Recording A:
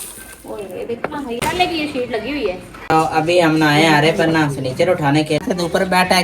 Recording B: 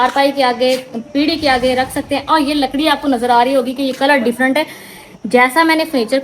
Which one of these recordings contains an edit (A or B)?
A